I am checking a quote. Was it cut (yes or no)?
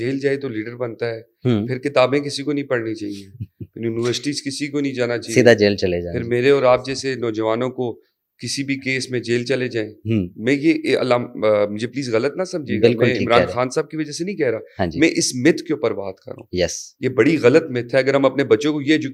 no